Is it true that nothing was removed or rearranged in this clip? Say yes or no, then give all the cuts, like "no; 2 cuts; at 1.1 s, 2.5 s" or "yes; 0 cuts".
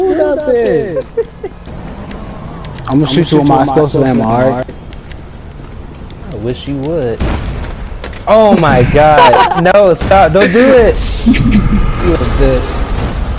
no; 1 cut; at 1.6 s